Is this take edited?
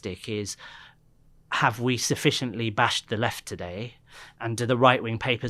no; 0 cuts

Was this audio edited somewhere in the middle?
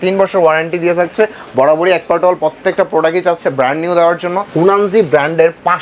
yes; 1 cut; at 4.4 s

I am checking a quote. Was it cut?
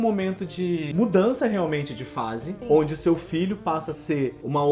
yes; 2 cuts; at 0.9 s, 2.5 s

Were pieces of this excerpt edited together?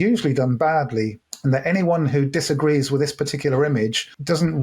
yes; 1 cut; at 1.2 s

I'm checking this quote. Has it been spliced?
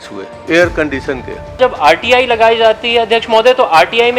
yes; 1 cut; at 1.6 s

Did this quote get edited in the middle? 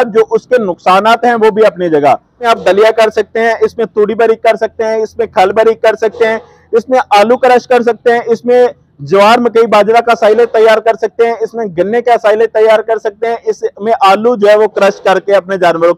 yes; 1 cut; at 2.4 s

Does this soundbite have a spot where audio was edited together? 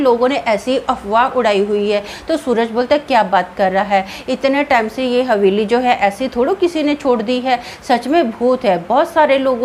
no; 0 cuts

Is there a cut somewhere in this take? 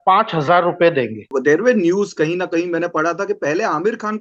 yes; 1 cut; at 1.3 s

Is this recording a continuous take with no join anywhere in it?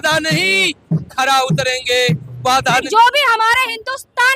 no; 1 cut; at 2.8 s

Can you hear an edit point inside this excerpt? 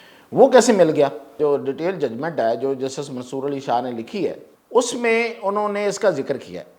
yes; 2 cuts; at 1.4 s, 4.5 s

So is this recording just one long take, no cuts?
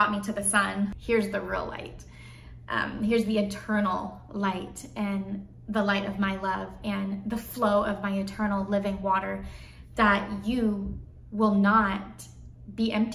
no; 1 cut; at 1.0 s

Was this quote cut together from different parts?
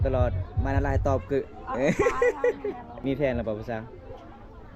yes; 1 cut; at 2.9 s

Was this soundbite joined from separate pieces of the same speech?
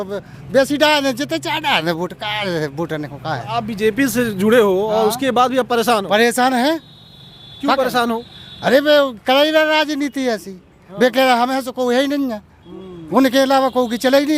no; 0 cuts

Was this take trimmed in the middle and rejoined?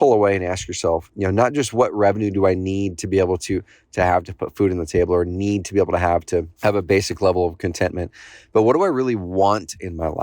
yes; 2 cuts; at 1.1 s, 6.5 s

